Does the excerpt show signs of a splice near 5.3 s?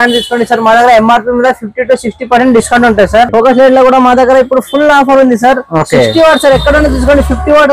no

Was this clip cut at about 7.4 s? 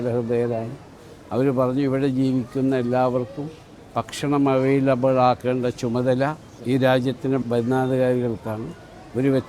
yes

